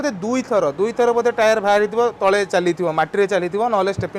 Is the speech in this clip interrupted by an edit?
no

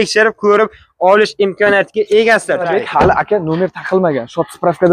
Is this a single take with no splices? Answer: no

